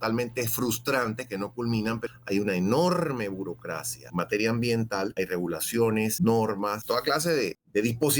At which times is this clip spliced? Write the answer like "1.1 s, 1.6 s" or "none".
2.0 s, 4.0 s, 5.1 s, 6.1 s, 7.1 s